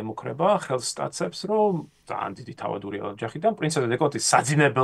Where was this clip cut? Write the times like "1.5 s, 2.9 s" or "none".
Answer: 2.0 s

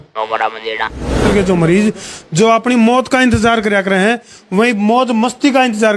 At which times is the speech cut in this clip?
1.2 s

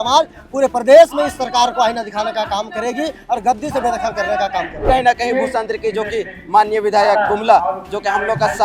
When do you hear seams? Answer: 4.8 s

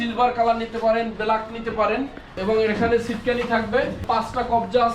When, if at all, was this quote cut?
2.3 s, 4.0 s

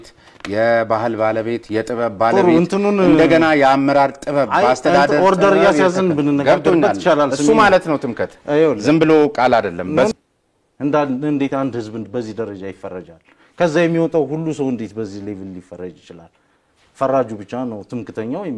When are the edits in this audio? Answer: 10.1 s

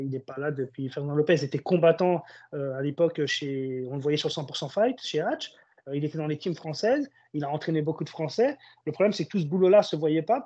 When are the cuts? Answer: none

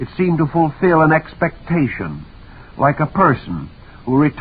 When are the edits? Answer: 1.0 s

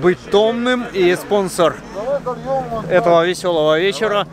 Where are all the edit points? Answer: none

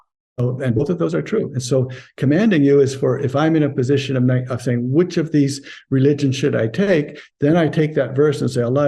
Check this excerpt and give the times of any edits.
none

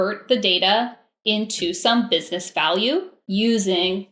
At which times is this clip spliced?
3.2 s

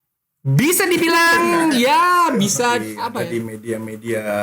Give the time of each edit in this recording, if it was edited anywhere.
3.0 s

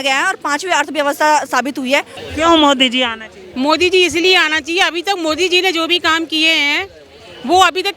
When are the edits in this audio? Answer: 2.2 s

